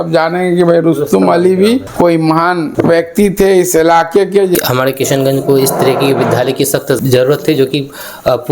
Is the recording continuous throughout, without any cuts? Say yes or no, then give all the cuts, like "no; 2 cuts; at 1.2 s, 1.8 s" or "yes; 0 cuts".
no; 2 cuts; at 4.5 s, 7.0 s